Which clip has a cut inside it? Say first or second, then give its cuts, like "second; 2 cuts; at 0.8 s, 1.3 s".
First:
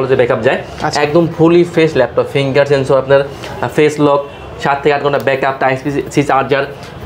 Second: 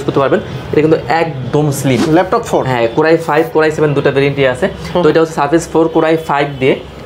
second; 1 cut; at 2.0 s